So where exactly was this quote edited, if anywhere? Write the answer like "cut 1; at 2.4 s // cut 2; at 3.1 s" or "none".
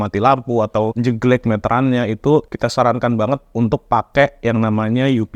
cut 1; at 0.9 s // cut 2; at 2.5 s